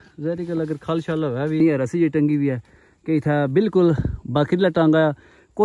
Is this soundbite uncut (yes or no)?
no